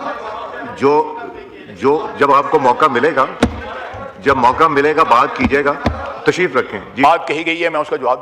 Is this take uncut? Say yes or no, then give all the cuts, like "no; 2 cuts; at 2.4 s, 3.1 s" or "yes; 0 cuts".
yes; 0 cuts